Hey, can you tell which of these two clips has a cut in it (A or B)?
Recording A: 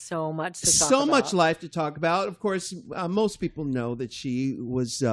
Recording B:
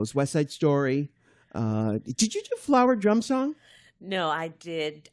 B